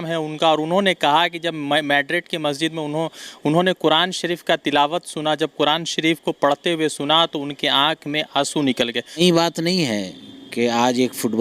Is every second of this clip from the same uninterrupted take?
no; 1 cut; at 9.2 s

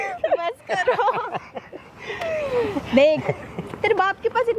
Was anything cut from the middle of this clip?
no; 0 cuts

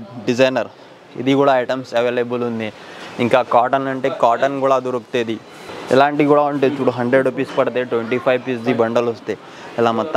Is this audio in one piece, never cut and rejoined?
yes; 0 cuts

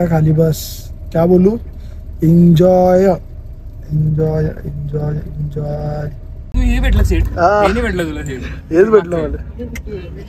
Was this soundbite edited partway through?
yes; 1 cut; at 6.5 s

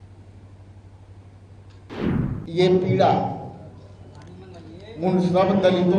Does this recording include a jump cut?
yes; 1 cut; at 1.9 s

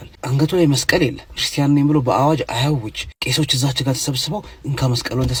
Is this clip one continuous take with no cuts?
yes; 0 cuts

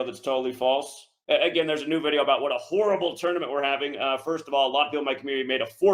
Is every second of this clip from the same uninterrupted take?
no; 1 cut; at 1.1 s

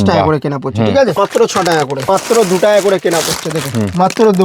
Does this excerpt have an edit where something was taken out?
yes; 2 cuts; at 1.1 s, 2.0 s

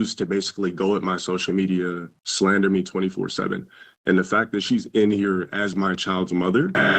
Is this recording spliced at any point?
no; 0 cuts

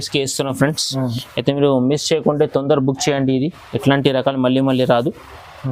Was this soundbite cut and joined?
no; 0 cuts

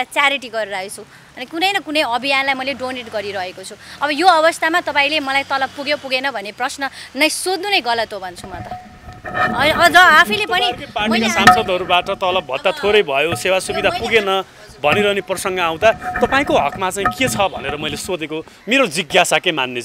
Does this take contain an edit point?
no; 0 cuts

